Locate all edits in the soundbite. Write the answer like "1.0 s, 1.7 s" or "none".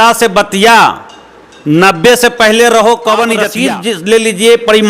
3.5 s